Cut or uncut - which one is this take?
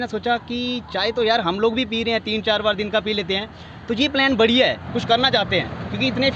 cut